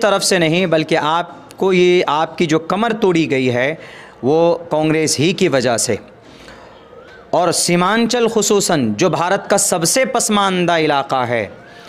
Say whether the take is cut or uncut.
uncut